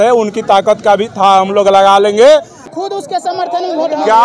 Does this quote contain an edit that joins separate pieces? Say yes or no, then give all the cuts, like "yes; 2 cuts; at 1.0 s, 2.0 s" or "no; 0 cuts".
yes; 1 cut; at 2.6 s